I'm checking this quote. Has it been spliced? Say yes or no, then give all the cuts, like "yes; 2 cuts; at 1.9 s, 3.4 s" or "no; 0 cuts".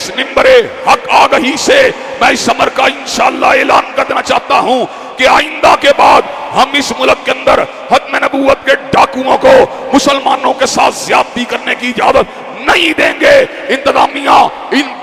no; 0 cuts